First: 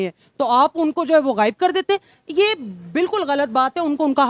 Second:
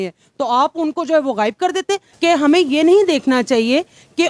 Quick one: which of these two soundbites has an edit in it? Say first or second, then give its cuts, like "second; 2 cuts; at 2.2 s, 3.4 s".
second; 1 cut; at 2.1 s